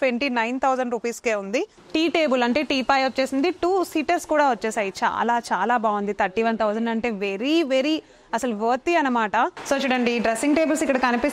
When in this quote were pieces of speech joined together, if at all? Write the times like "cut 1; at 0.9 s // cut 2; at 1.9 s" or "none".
cut 1; at 1.8 s // cut 2; at 9.6 s